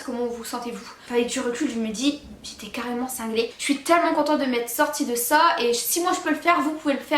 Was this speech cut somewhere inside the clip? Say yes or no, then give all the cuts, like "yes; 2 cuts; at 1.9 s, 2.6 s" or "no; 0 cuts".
yes; 2 cuts; at 0.9 s, 3.5 s